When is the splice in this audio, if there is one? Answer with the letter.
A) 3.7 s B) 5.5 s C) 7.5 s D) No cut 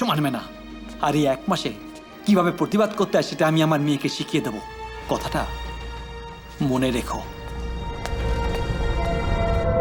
D